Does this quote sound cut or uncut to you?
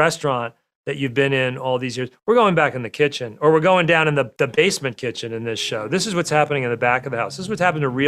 uncut